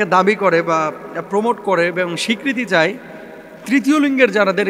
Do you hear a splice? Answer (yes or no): no